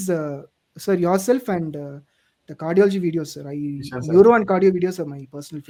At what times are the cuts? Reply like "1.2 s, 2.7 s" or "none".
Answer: none